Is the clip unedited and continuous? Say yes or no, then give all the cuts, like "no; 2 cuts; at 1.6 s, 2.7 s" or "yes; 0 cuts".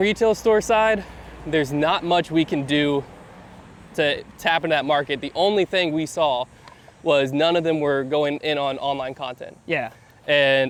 yes; 0 cuts